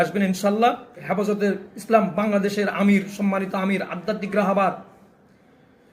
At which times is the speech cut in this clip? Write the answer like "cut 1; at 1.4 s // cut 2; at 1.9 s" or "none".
cut 1; at 1.0 s